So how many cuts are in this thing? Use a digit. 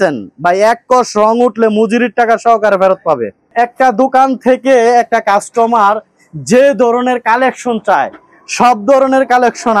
1